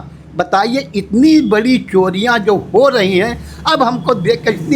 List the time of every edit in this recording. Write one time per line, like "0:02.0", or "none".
none

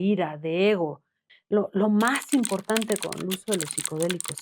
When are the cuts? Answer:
0:01.2

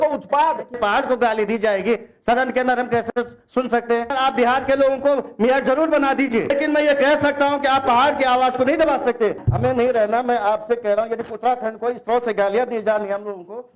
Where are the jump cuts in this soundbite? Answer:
0:00.8
0:04.1
0:06.5
0:09.5

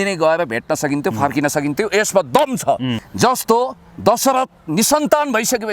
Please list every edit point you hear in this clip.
0:03.0

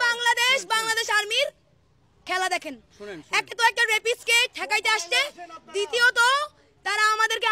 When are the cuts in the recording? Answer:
none

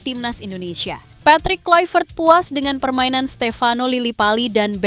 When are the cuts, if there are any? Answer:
0:01.1

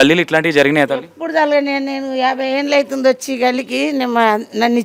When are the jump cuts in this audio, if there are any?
none

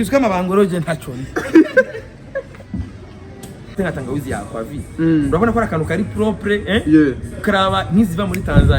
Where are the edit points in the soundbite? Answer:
0:03.8

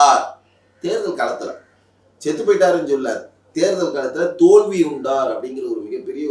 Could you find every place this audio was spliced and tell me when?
none

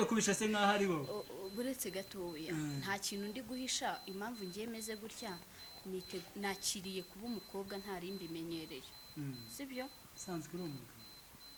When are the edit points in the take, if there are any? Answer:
none

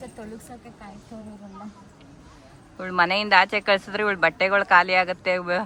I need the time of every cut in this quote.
none

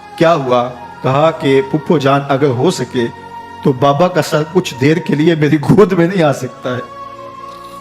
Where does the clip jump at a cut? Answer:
0:06.8

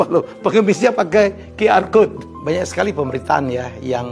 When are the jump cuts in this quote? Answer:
0:02.1

